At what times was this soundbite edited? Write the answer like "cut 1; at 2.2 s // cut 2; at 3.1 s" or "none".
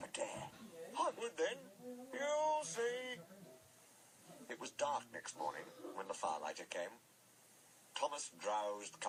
none

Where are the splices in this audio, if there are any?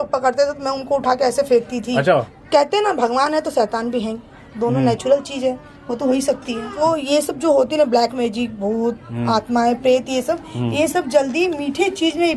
cut 1; at 2.4 s // cut 2; at 6.8 s

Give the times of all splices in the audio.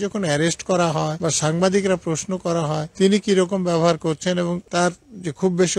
cut 1; at 1.1 s // cut 2; at 2.9 s // cut 3; at 4.6 s

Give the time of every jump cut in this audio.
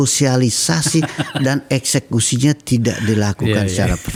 none

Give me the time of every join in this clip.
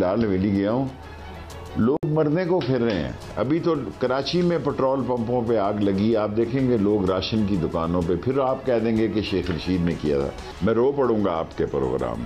none

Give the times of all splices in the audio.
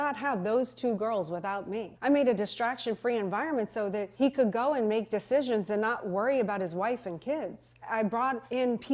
none

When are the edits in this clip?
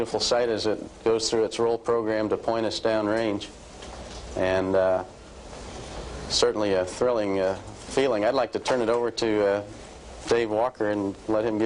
none

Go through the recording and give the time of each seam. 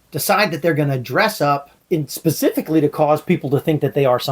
cut 1; at 1.7 s

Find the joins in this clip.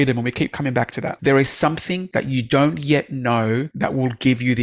cut 1; at 1.1 s // cut 2; at 2.0 s // cut 3; at 3.7 s

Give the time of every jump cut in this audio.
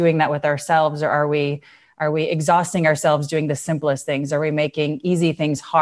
none

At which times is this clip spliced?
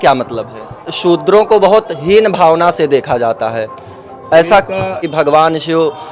cut 1; at 0.9 s // cut 2; at 5.0 s

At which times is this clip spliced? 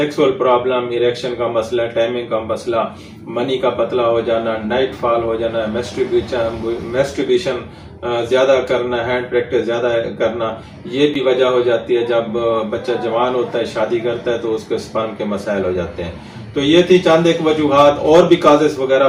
none

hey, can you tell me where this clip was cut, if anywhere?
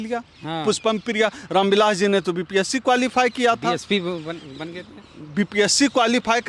none

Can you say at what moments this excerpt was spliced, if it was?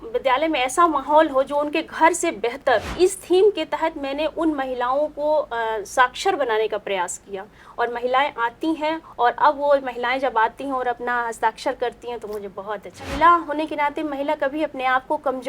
cut 1; at 2.9 s // cut 2; at 13.1 s

